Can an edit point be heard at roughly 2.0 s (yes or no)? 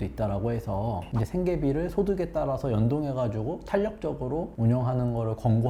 no